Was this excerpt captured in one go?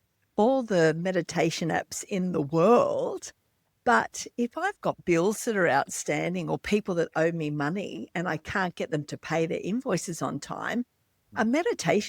yes; 0 cuts

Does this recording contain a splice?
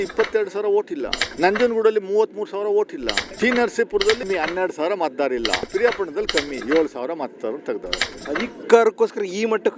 yes; 5 cuts; at 1.2 s, 3.2 s, 4.2 s, 5.7 s, 8.2 s

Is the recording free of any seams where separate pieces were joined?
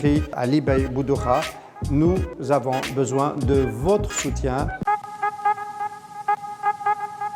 yes; 0 cuts

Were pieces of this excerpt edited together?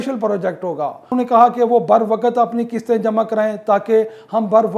yes; 1 cut; at 1.1 s

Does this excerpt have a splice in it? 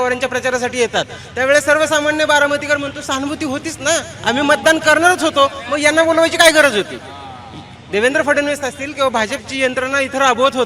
no; 0 cuts

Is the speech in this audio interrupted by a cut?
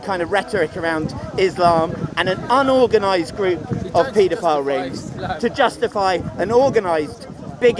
no; 0 cuts

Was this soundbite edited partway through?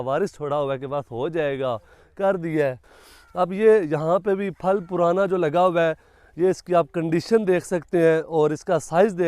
yes; 1 cut; at 2.9 s

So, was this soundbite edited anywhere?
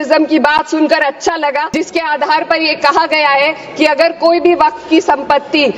yes; 1 cut; at 1.7 s

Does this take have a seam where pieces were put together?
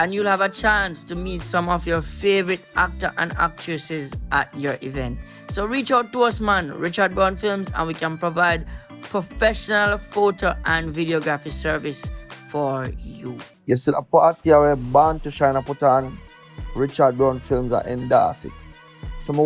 yes; 1 cut; at 13.5 s

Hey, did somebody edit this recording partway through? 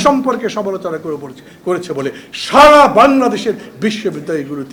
no; 0 cuts

